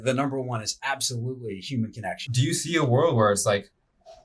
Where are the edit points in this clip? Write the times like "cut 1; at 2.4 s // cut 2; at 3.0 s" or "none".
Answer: cut 1; at 2.2 s